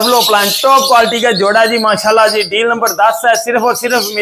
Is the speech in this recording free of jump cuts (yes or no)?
yes